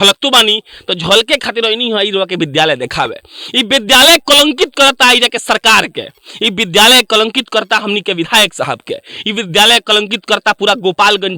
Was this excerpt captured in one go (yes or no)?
yes